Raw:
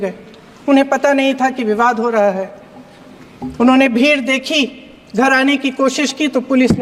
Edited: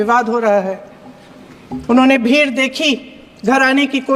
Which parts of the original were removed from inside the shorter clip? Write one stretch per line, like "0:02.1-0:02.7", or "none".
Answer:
none